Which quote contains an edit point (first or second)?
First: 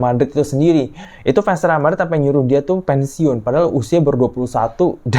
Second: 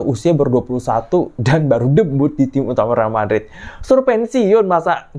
first